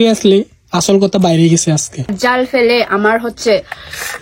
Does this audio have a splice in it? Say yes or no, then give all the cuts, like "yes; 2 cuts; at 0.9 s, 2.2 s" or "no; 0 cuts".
yes; 1 cut; at 2.2 s